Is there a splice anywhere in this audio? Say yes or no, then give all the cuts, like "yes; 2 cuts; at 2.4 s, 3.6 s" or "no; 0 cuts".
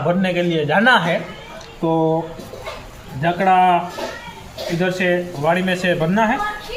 no; 0 cuts